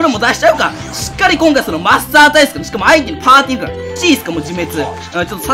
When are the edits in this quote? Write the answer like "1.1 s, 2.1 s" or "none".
4.0 s